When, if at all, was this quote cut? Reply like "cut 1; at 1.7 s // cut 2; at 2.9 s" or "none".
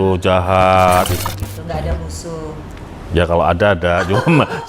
cut 1; at 1.2 s